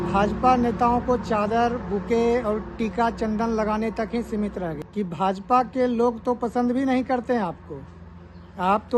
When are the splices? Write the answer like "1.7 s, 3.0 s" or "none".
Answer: 4.8 s

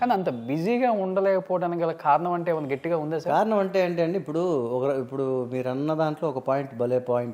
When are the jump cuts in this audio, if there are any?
none

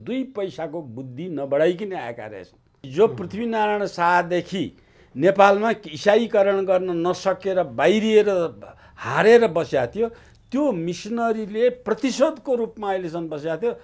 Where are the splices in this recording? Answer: 2.9 s

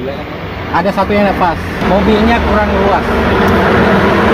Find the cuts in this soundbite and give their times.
1.8 s

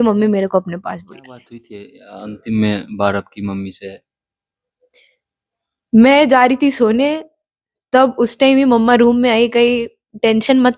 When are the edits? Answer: 1.8 s

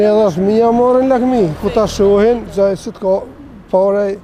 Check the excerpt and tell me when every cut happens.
none

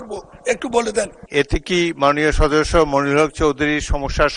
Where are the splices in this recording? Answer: 1.2 s

